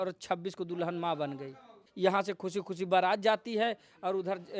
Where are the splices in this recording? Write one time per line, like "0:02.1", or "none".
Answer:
0:01.8